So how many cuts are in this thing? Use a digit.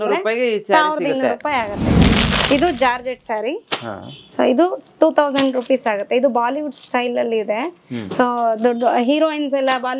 1